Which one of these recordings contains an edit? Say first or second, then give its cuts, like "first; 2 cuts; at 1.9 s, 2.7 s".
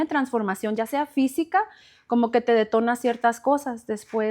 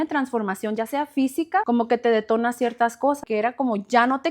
second; 2 cuts; at 1.6 s, 3.2 s